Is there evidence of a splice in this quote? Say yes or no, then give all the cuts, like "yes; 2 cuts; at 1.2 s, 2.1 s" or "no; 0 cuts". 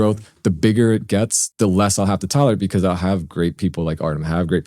yes; 1 cut; at 1.4 s